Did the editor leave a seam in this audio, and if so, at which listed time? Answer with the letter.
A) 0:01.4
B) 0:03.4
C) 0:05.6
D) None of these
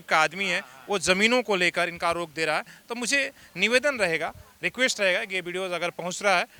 D